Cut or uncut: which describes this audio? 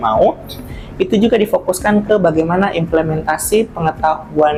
uncut